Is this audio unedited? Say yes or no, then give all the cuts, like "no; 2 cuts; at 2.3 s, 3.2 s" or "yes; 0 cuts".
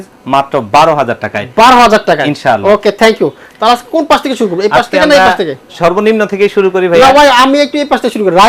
yes; 0 cuts